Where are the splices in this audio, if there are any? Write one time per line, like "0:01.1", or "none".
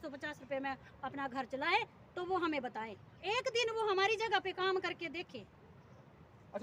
none